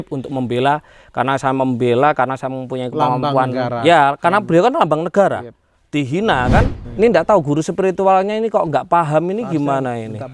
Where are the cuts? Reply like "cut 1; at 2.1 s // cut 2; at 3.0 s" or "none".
cut 1; at 6.8 s